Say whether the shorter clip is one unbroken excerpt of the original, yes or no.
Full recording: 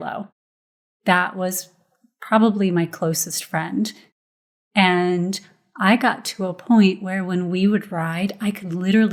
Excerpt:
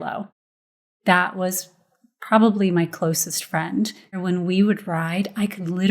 no